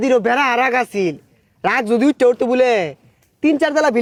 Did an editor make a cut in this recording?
no; 0 cuts

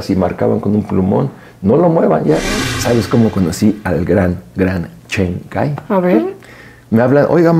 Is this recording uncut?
no; 1 cut; at 2.7 s

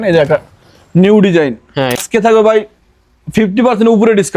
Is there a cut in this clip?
yes; 1 cut; at 2.0 s

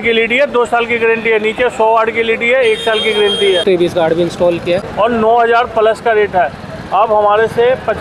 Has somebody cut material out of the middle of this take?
yes; 2 cuts; at 3.6 s, 4.9 s

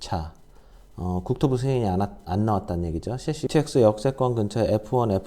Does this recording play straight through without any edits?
no; 1 cut; at 3.4 s

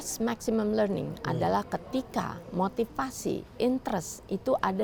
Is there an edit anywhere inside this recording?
no; 0 cuts

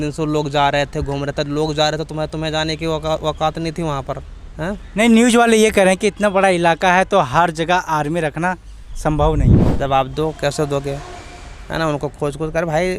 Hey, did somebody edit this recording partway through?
yes; 1 cut; at 9.6 s

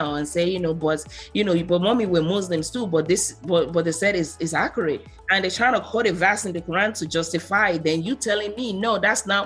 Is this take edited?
no; 0 cuts

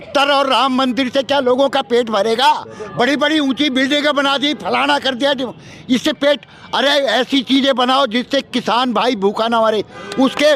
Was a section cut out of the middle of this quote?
no; 0 cuts

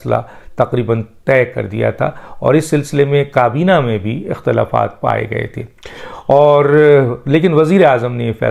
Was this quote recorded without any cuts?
yes; 0 cuts

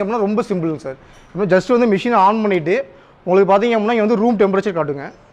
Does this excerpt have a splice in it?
no; 0 cuts

